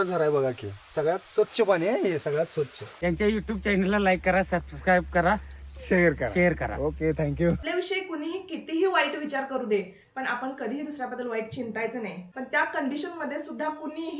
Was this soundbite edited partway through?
yes; 3 cuts; at 2.9 s, 7.6 s, 12.2 s

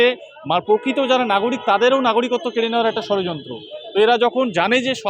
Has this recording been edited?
no; 0 cuts

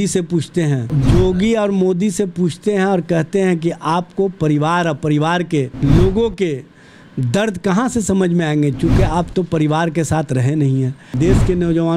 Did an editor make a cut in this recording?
yes; 3 cuts; at 0.9 s, 5.7 s, 11.1 s

